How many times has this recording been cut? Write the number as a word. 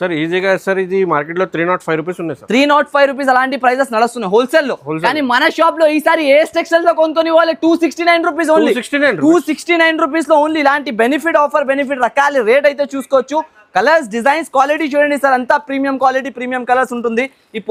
zero